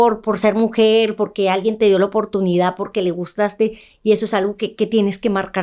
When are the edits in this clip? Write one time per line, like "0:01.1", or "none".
none